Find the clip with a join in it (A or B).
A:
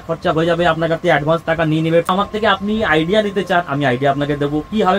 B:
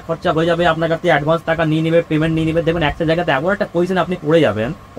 A